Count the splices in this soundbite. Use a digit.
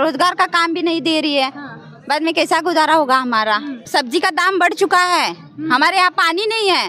1